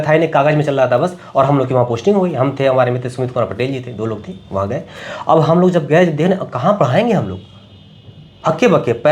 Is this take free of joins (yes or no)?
yes